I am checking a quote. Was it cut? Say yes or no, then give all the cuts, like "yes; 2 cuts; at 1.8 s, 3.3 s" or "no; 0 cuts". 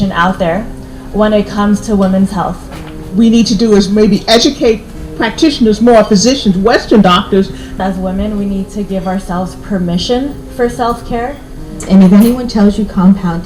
yes; 3 cuts; at 3.0 s, 7.7 s, 11.7 s